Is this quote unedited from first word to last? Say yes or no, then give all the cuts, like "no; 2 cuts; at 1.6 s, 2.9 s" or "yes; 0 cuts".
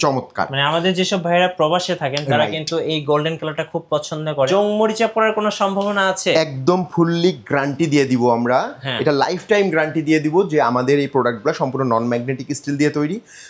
no; 1 cut; at 4.5 s